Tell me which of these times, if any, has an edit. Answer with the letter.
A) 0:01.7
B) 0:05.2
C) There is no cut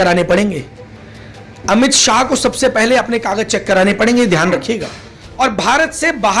B